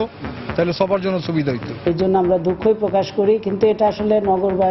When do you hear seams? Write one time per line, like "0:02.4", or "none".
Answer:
0:01.7